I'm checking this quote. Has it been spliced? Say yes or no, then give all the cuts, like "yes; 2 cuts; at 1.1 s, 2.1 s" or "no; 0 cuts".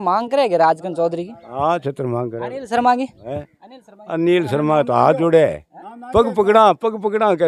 no; 0 cuts